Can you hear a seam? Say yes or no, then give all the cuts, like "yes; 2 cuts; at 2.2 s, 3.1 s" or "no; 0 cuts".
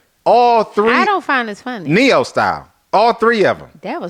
no; 0 cuts